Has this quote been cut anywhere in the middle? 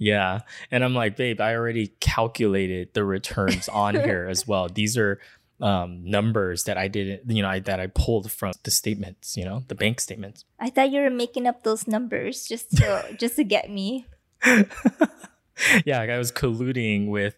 no; 0 cuts

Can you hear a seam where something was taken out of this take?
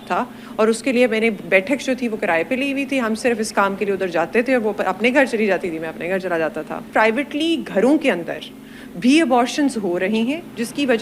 yes; 1 cut; at 6.9 s

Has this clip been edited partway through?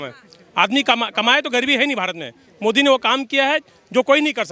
no; 0 cuts

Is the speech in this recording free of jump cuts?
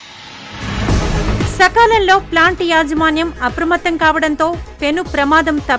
no; 1 cut; at 1.4 s

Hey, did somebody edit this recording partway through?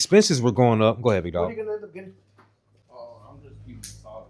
no; 0 cuts

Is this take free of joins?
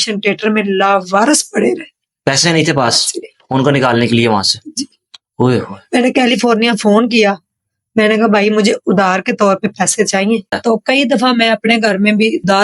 no; 1 cut; at 10.5 s

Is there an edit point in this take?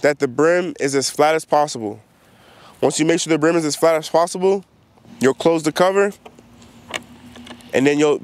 no; 0 cuts

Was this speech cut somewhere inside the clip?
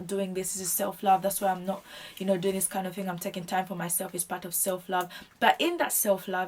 no; 0 cuts

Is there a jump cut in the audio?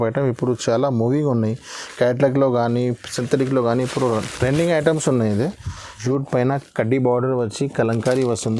yes; 1 cut; at 6.0 s

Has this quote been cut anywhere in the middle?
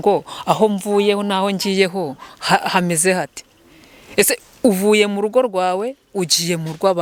no; 0 cuts

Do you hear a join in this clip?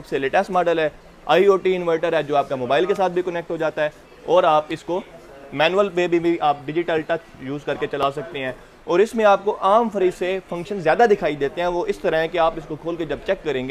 no; 0 cuts

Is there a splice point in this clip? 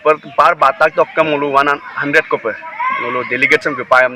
no; 0 cuts

